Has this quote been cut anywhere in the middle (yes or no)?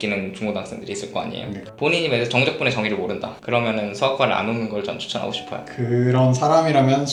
no